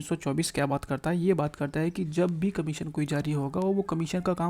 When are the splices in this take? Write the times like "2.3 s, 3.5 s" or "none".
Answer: none